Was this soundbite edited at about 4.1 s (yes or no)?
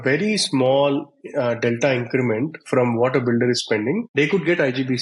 yes